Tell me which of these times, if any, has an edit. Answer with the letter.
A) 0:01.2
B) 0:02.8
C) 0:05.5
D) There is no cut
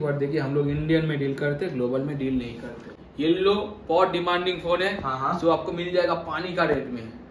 B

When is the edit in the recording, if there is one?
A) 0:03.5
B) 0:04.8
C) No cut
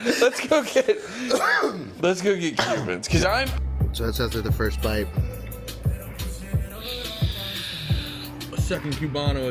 A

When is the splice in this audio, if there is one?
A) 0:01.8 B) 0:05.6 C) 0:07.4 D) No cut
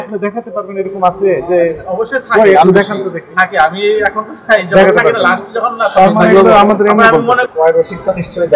C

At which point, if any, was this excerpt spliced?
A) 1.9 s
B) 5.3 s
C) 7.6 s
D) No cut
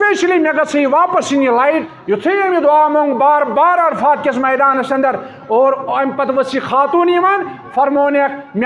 A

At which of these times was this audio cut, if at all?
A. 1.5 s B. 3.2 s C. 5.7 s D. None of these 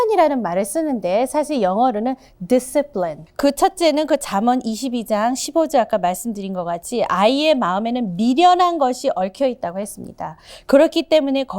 B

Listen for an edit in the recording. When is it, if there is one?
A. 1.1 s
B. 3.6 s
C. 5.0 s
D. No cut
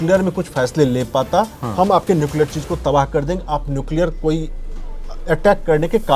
D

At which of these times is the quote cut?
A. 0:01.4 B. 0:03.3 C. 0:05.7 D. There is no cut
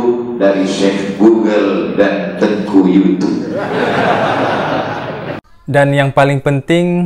C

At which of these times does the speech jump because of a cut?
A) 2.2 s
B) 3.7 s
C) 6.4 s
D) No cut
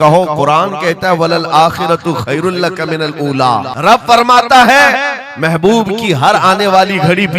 B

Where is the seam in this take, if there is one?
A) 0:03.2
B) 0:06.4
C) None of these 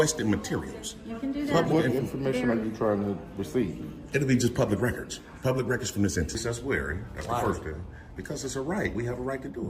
B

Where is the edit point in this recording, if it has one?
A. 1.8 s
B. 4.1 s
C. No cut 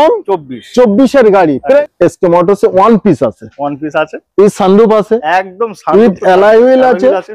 A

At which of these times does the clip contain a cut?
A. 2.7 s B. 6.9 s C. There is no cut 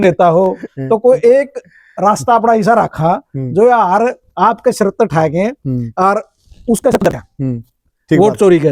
C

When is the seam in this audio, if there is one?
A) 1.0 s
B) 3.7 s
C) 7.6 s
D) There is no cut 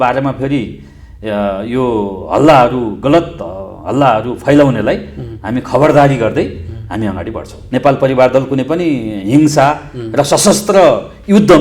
C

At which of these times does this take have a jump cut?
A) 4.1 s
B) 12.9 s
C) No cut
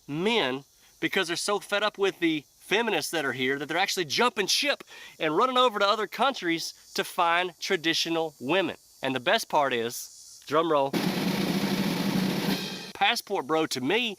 B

